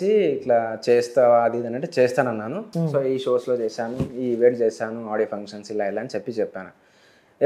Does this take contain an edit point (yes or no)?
yes